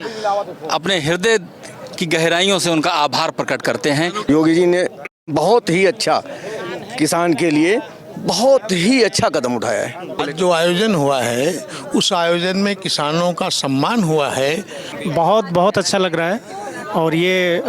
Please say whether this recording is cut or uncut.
cut